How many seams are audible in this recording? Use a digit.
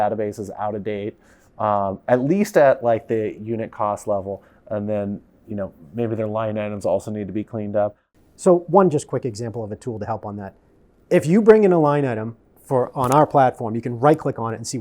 1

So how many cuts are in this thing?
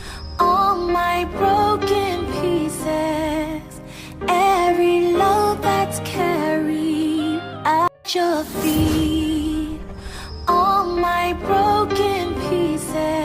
1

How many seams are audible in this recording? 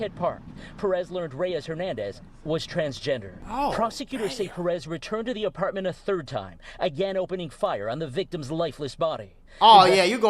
1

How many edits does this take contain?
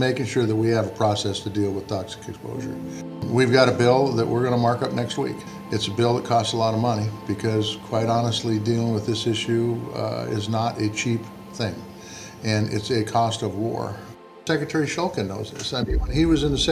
3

